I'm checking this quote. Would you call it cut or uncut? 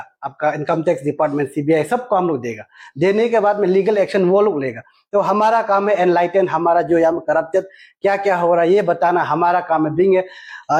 uncut